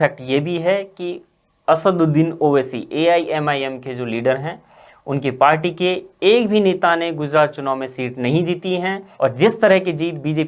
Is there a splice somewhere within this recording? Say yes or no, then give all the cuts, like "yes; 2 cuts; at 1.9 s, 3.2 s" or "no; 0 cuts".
yes; 1 cut; at 9.1 s